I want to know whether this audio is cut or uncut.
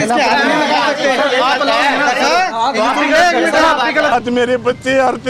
cut